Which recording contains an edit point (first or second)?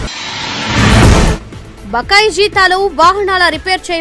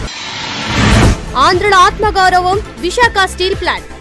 first